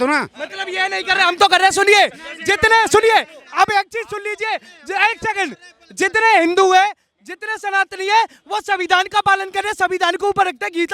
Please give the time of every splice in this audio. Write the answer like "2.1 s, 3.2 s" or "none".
none

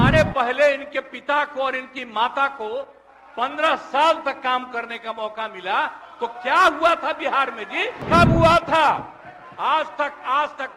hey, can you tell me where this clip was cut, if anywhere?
8.0 s

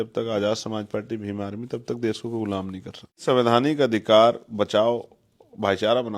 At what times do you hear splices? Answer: 3.2 s

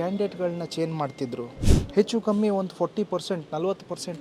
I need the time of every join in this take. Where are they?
1.6 s

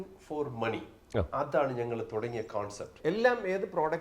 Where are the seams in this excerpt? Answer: 3.0 s

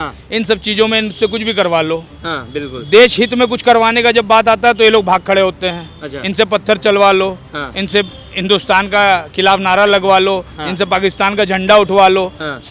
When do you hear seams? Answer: none

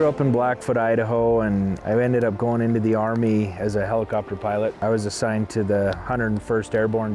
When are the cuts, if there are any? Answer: 1.8 s, 4.8 s

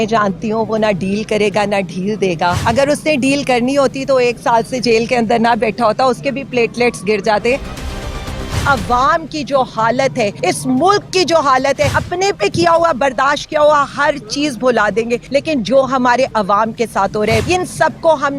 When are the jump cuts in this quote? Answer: 2.6 s, 8.2 s, 10.4 s, 12.0 s, 15.2 s, 17.4 s

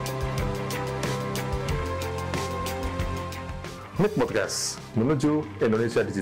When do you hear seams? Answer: none

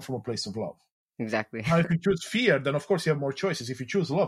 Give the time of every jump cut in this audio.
none

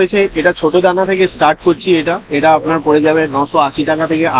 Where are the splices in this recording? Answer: none

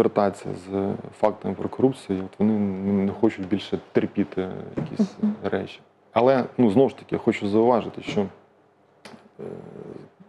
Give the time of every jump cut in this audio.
none

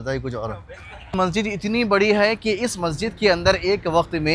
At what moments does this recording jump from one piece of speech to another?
1.1 s

